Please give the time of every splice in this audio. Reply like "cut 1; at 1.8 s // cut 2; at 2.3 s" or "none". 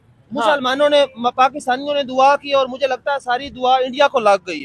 none